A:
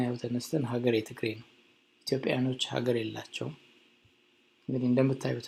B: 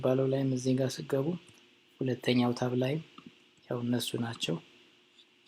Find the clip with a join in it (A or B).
B